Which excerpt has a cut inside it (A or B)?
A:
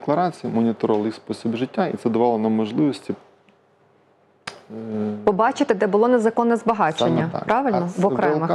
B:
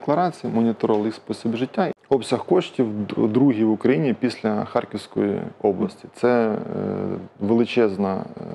B